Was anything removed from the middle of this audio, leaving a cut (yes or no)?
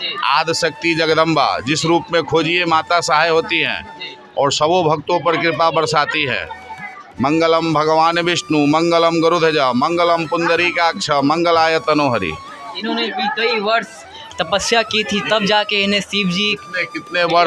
no